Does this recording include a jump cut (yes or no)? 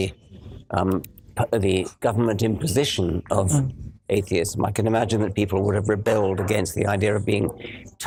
no